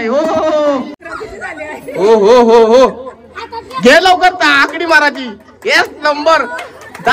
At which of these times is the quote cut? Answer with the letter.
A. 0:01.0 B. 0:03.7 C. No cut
A